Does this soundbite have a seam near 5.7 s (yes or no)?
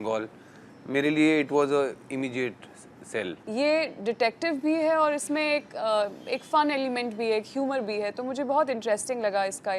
no